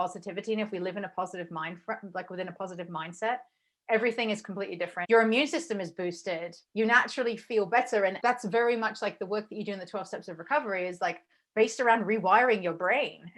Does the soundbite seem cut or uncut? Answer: cut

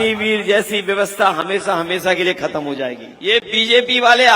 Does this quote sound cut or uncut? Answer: cut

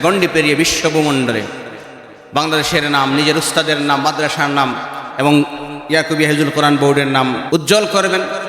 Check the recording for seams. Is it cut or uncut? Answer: cut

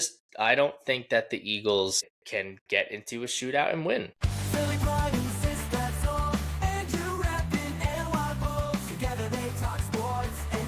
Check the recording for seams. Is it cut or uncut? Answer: cut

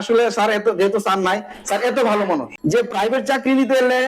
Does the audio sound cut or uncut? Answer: cut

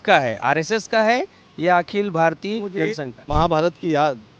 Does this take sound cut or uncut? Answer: cut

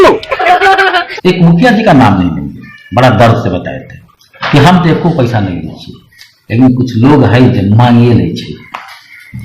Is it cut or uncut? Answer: cut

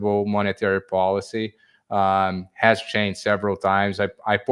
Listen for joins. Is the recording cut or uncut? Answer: uncut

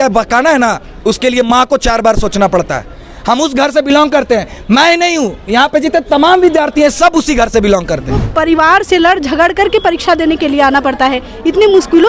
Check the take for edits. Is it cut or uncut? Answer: cut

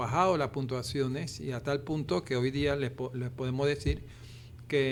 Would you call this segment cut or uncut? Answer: uncut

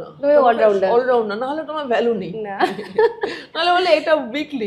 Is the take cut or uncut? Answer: uncut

